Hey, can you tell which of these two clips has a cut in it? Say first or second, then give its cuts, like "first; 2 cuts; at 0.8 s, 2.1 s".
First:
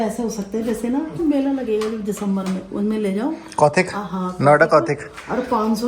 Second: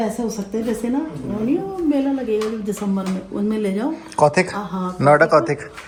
first; 1 cut; at 1.1 s